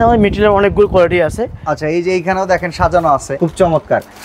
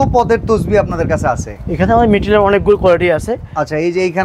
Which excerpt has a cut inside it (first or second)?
first